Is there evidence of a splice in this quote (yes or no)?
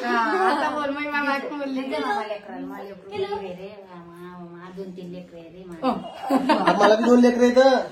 no